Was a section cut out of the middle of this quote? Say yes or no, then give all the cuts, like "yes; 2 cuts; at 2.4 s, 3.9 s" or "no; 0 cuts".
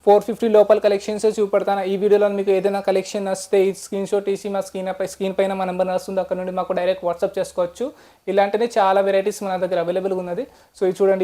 no; 0 cuts